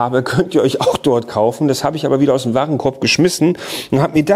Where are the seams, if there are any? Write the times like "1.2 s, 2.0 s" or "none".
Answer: none